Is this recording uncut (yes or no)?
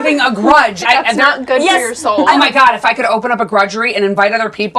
no